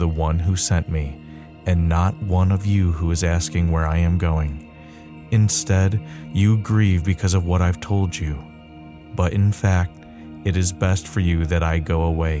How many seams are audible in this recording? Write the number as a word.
zero